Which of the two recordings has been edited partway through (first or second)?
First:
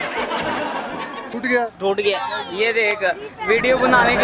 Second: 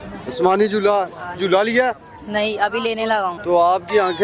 first